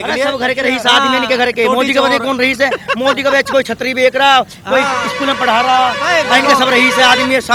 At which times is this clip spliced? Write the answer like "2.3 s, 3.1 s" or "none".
none